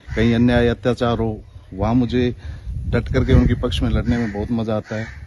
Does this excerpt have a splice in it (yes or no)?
no